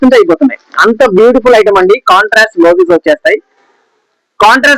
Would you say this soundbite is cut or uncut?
uncut